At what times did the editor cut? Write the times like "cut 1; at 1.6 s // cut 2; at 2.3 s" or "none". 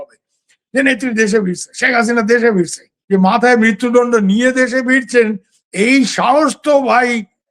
cut 1; at 2.9 s